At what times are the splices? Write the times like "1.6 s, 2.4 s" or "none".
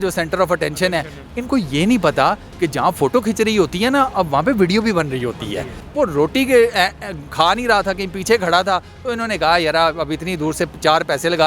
5.8 s